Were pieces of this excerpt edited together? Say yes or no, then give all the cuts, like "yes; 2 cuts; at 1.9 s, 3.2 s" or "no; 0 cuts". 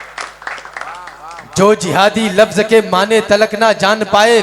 yes; 1 cut; at 0.9 s